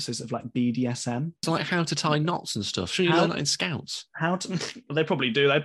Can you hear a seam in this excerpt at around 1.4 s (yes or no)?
yes